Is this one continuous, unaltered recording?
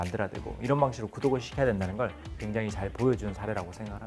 yes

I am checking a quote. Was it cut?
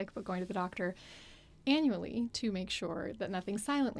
no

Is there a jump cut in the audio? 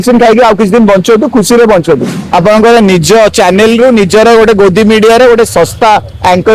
yes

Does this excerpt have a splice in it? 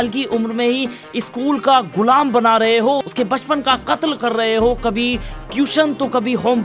no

